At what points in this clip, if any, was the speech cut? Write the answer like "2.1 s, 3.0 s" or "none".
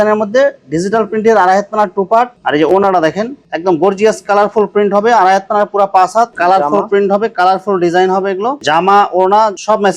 2.4 s, 6.3 s, 8.6 s